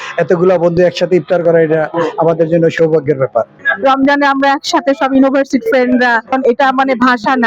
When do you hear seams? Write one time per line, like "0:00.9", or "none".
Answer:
0:03.6